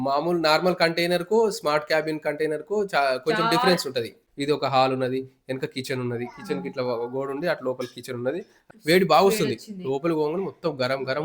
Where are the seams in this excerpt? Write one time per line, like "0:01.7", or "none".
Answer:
0:04.2
0:08.6